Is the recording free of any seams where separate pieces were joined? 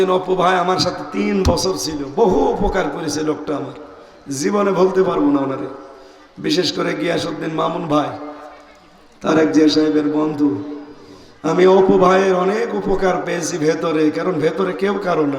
yes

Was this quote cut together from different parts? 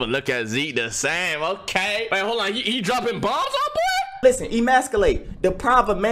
yes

